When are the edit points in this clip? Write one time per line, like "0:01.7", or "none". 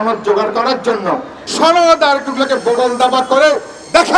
0:01.4